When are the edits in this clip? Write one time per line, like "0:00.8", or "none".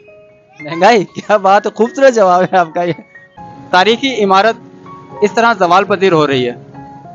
0:03.3